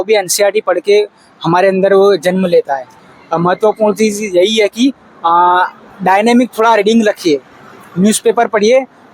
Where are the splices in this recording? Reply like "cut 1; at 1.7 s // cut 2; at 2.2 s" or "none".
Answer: cut 1; at 3.0 s